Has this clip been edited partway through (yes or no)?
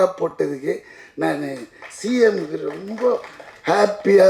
no